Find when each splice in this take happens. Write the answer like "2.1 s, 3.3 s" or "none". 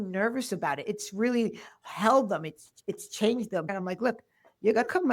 3.7 s